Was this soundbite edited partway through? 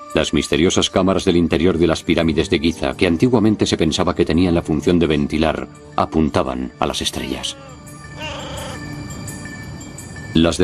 no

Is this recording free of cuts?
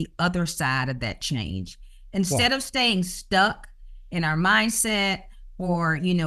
yes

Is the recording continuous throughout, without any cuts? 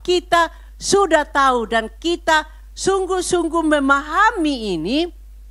yes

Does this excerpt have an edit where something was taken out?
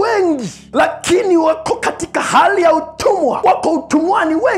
no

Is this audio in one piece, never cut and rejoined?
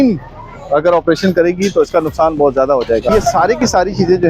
no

